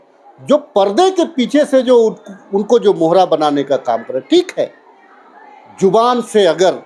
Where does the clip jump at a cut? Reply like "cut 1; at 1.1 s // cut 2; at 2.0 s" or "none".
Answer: none